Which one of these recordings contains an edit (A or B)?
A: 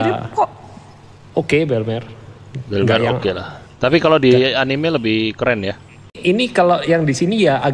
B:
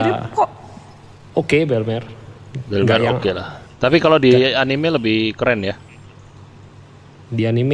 A